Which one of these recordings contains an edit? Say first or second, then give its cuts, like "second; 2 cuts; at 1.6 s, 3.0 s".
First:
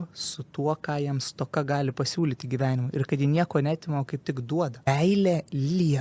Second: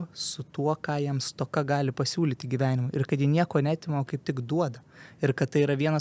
first; 1 cut; at 4.9 s